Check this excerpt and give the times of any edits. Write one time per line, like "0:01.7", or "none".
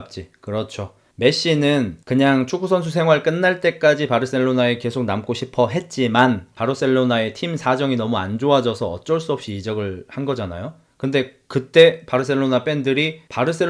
0:01.1